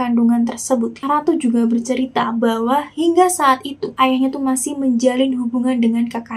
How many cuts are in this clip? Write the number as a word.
one